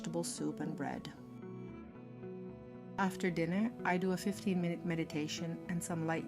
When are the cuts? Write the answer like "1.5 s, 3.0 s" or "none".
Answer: 1.1 s, 2.9 s